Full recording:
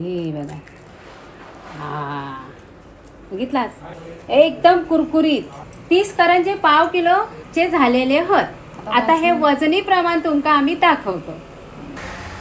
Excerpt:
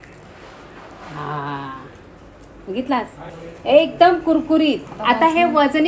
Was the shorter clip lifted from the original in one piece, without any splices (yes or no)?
no